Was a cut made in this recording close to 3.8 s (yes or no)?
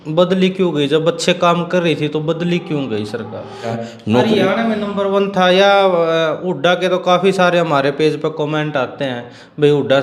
yes